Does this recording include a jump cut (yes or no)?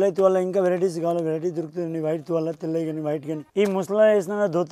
yes